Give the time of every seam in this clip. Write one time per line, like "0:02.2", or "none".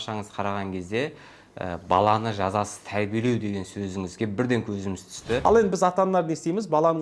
0:05.4